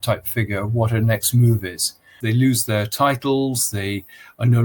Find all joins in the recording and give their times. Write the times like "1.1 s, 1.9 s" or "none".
2.2 s

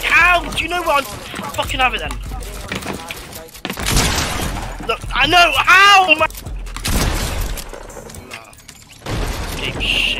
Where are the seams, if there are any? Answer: 2.7 s, 6.3 s

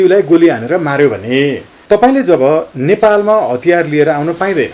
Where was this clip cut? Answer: 1.7 s

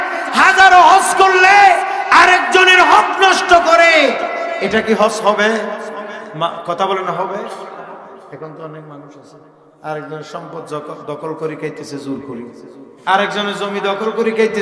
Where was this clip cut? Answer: none

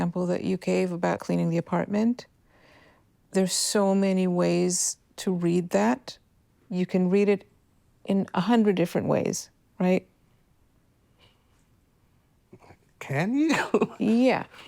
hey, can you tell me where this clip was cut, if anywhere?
1.2 s

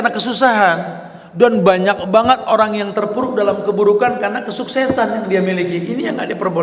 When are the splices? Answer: none

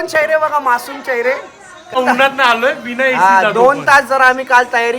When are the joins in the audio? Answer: 2.0 s

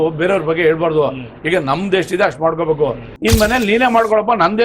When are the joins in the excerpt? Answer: 3.1 s

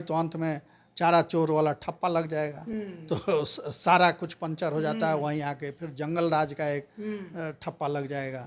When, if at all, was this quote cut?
none

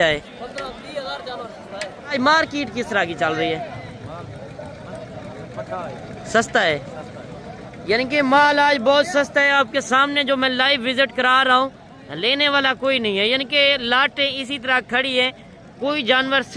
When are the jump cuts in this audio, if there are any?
2.1 s

